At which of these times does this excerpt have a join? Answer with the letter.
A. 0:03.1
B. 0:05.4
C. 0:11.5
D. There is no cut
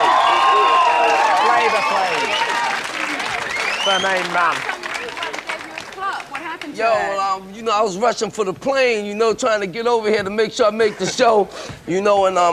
A